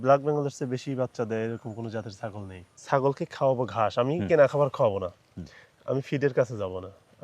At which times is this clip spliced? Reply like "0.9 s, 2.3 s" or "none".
2.7 s